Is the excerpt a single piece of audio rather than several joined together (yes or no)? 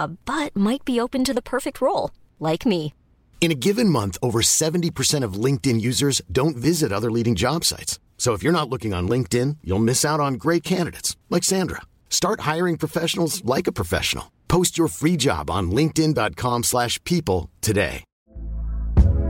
yes